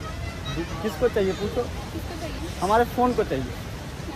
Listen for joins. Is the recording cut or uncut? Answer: uncut